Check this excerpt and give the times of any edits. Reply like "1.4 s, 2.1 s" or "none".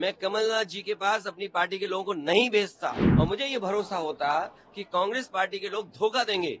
3.0 s